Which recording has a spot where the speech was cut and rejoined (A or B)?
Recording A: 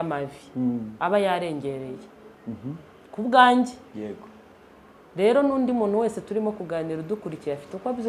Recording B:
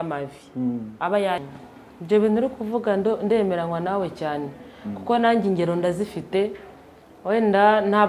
B